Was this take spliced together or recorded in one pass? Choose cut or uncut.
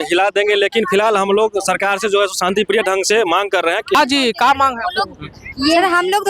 cut